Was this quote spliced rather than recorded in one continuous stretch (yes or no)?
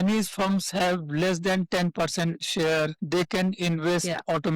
no